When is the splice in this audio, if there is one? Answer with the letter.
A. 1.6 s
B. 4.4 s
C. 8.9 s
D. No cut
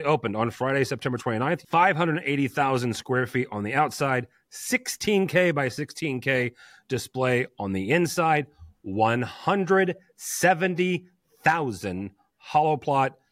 A